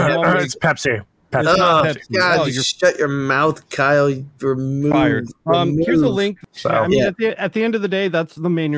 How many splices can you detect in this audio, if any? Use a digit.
1